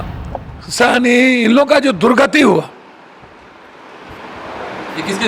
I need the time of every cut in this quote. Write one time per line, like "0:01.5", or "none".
none

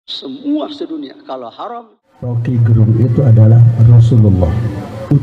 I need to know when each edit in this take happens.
0:02.3

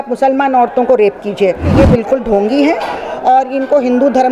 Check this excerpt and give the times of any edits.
0:01.7

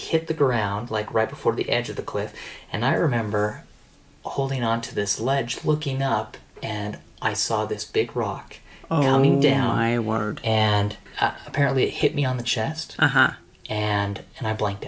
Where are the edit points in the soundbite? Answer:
0:11.0

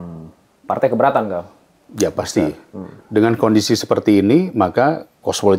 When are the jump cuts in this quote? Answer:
none

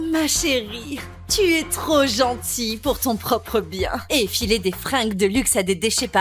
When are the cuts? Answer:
0:04.0

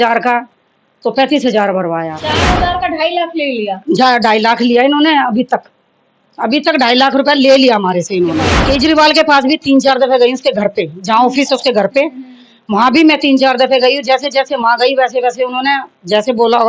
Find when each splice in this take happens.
0:02.2
0:08.6

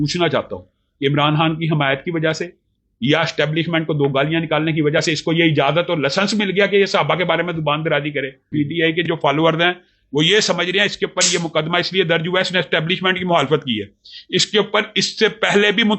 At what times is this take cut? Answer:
0:08.4

